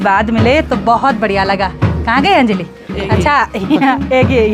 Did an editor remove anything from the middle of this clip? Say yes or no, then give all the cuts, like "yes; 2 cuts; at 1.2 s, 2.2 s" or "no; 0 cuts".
no; 0 cuts